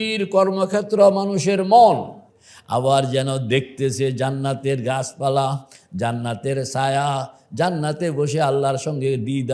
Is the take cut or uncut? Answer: cut